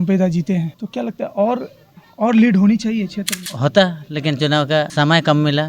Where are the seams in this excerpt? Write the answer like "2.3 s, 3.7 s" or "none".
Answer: 3.4 s, 4.9 s